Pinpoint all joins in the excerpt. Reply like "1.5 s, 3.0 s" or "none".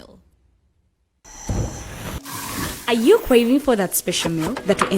1.2 s